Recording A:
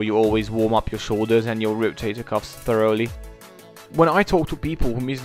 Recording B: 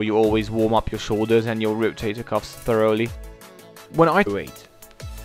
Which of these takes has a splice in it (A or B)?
A